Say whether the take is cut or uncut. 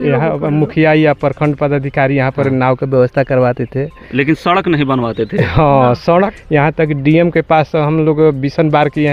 cut